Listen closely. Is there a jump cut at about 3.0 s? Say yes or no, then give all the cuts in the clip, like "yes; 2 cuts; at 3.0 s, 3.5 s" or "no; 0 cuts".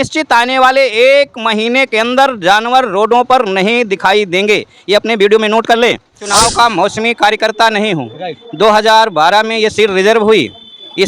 no; 1 cut; at 6.3 s